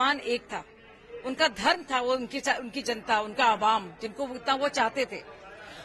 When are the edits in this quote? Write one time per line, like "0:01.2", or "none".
none